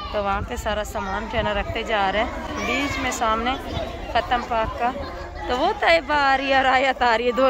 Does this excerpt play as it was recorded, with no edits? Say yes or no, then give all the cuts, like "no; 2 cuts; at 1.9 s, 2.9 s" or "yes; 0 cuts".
yes; 0 cuts